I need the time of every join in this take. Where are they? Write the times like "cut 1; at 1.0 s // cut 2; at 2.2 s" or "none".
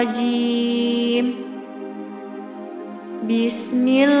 none